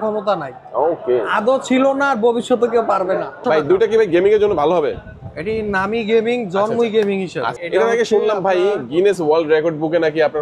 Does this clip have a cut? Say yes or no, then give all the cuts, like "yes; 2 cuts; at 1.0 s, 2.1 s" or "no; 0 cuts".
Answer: yes; 2 cuts; at 3.4 s, 7.5 s